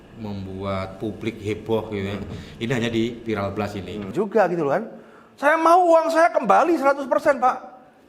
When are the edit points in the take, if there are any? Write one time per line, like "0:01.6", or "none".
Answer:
0:04.1